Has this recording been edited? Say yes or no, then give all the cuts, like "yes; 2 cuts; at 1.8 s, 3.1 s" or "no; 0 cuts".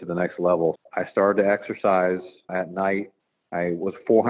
yes; 2 cuts; at 0.8 s, 2.5 s